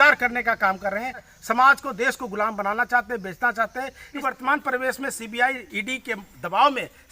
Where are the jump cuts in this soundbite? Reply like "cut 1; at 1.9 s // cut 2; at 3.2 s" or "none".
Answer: cut 1; at 1.3 s // cut 2; at 4.2 s